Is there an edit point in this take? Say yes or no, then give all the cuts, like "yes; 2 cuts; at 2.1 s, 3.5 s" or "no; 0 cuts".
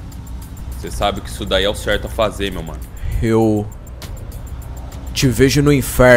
yes; 1 cut; at 2.8 s